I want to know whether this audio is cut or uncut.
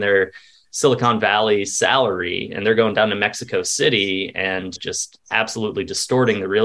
uncut